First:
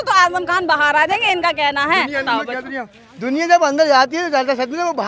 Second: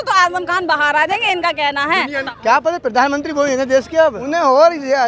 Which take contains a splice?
second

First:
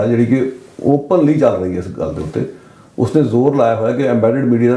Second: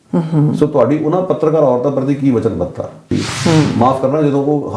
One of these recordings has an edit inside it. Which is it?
second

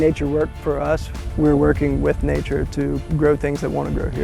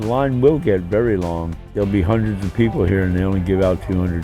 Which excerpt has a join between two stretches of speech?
second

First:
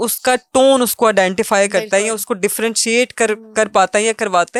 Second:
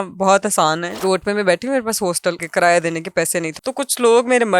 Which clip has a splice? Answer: second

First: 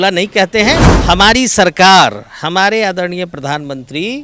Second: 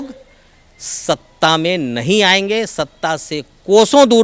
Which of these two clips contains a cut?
first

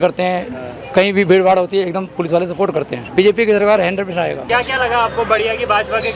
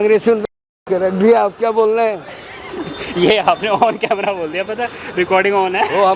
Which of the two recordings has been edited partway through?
first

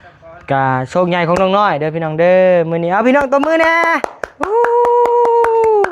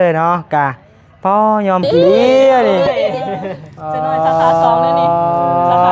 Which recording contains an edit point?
second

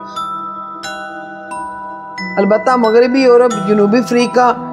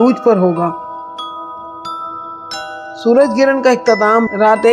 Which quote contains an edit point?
second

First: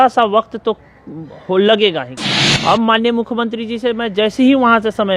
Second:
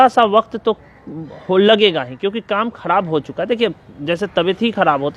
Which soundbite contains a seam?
first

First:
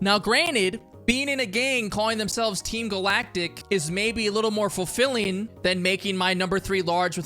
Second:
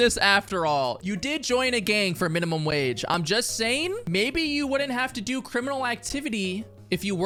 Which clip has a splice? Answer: first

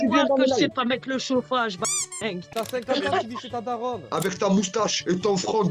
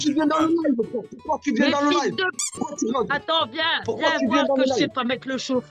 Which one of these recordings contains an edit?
first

